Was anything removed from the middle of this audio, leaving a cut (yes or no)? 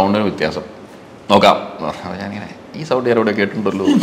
no